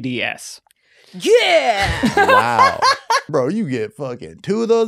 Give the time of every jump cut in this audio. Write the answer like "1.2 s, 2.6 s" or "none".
3.3 s